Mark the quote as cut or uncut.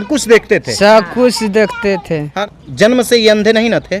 cut